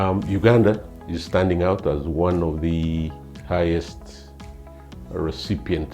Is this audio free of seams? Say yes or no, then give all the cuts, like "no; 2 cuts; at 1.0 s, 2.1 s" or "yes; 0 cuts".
no; 1 cut; at 3.3 s